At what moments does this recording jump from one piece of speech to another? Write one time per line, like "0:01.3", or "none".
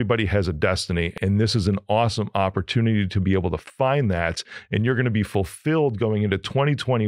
0:01.1